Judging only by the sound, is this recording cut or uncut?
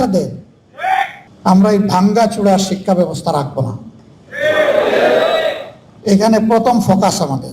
cut